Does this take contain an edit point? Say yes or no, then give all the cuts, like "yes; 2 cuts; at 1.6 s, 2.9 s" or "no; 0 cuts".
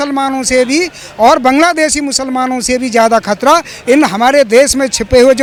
no; 0 cuts